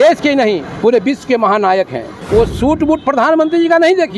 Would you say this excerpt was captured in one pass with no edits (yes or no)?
no